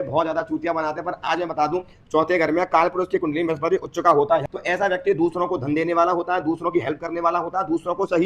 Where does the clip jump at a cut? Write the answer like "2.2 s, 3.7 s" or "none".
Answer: 4.4 s

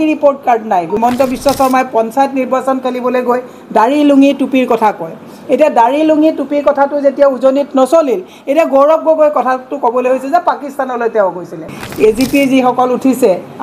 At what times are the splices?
1.0 s, 11.8 s

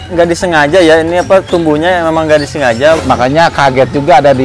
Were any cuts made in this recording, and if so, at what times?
3.0 s

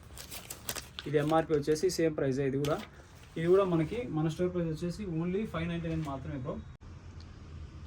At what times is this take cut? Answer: 6.7 s

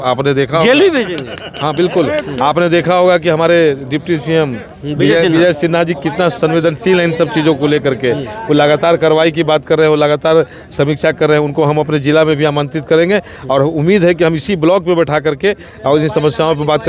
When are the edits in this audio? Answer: none

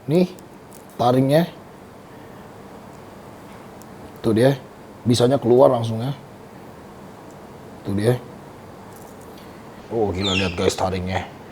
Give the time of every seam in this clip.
9.8 s

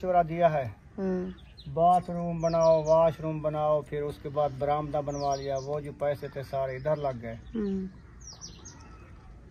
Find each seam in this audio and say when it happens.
none

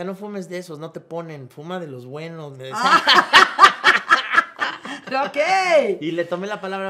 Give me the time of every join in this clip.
none

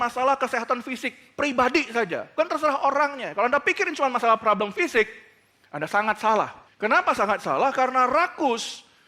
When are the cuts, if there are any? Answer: 2.3 s, 6.6 s

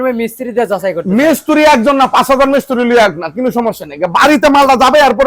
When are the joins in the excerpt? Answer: none

